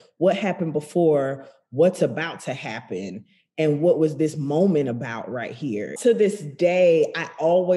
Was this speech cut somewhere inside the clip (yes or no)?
yes